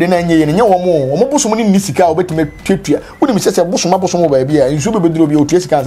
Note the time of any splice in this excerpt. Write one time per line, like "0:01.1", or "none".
none